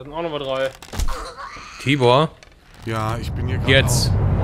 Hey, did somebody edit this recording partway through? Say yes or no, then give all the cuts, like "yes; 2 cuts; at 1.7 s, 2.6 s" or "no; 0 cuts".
no; 0 cuts